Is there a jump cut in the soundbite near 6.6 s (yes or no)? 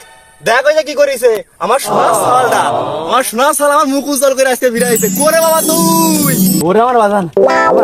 yes